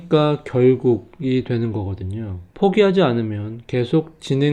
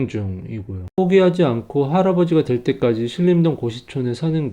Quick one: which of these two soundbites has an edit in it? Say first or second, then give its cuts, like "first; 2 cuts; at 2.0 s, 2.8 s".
second; 1 cut; at 1.0 s